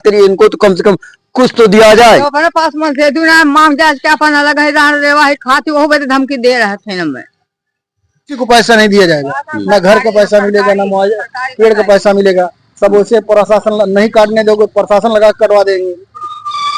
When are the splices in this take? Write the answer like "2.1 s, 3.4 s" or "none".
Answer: 8.4 s